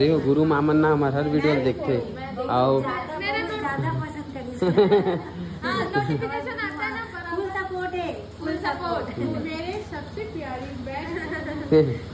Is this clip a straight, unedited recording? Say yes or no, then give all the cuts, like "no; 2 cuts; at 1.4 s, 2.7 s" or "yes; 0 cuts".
yes; 0 cuts